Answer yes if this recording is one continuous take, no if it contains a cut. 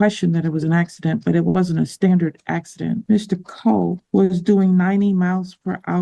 no